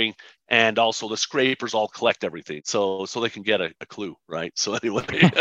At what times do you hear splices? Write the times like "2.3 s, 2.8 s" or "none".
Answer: 2.5 s